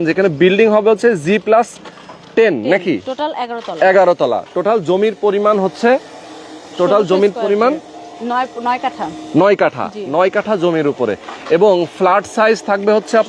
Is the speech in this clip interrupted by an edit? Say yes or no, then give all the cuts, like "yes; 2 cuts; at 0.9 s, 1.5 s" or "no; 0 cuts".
no; 0 cuts